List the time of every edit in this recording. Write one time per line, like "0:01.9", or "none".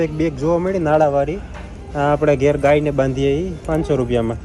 none